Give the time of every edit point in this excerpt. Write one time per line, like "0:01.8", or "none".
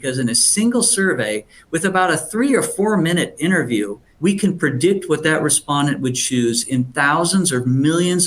0:04.1